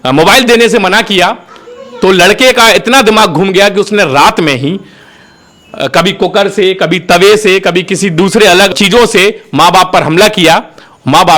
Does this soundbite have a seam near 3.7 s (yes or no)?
no